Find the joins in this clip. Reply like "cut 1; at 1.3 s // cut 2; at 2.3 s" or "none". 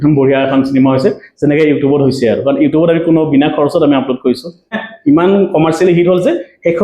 cut 1; at 4.9 s